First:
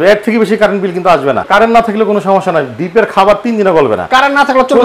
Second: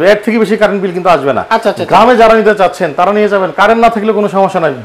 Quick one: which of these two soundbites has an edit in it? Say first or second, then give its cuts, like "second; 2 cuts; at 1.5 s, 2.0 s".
first; 1 cut; at 1.4 s